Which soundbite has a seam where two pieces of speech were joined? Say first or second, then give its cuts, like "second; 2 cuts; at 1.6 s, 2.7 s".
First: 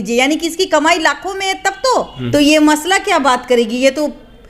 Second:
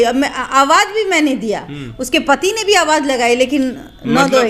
first; 1 cut; at 2.2 s